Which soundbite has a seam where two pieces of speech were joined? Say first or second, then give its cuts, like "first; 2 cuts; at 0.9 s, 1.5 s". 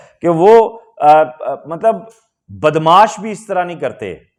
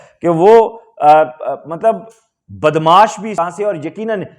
second; 1 cut; at 3.4 s